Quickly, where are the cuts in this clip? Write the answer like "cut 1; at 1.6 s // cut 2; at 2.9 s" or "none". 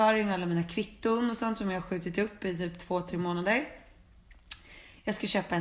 none